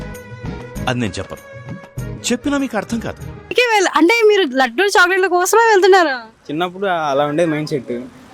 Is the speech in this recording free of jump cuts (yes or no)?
no